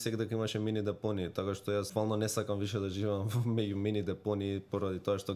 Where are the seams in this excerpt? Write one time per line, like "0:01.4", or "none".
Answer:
0:01.9